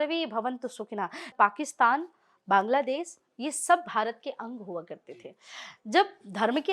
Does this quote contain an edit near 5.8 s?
no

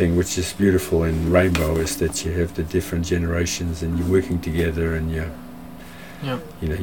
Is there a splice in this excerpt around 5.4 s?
no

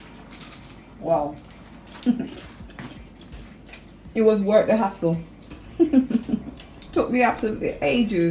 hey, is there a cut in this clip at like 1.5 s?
no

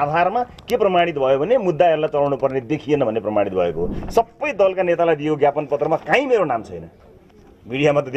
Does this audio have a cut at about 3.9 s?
yes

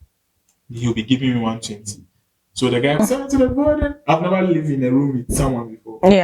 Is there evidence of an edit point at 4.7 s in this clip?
no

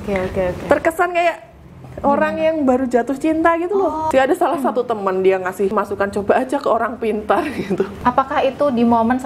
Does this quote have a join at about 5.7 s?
yes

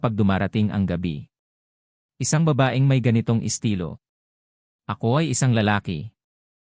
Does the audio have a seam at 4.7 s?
yes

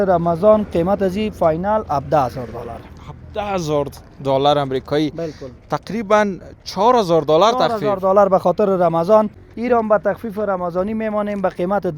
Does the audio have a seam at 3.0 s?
no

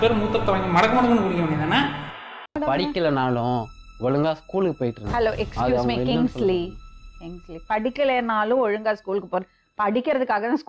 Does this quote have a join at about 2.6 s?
yes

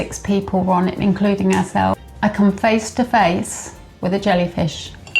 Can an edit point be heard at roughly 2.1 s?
yes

